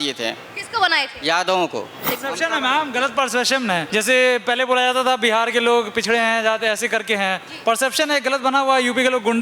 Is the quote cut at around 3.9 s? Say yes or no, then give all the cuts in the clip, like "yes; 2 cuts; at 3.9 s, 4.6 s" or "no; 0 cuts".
yes; 2 cuts; at 2.2 s, 3.9 s